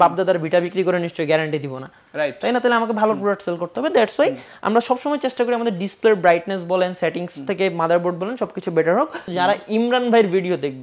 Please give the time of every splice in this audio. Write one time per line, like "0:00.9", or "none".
0:09.2